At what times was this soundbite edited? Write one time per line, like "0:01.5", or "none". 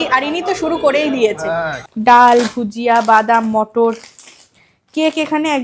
0:01.8